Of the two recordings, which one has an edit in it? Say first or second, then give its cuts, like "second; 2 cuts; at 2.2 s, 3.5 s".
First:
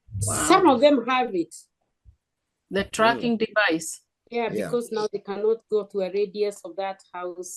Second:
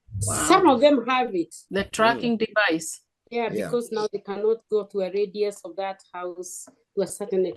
second; 1 cut; at 1.6 s